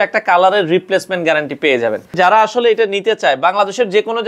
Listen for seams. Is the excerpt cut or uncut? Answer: cut